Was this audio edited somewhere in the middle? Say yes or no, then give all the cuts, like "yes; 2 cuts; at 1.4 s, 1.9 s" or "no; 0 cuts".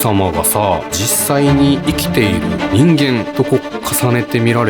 yes; 3 cuts; at 1.1 s, 2.6 s, 3.3 s